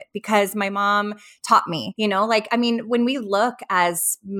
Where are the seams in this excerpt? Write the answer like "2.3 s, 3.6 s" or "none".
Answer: 1.9 s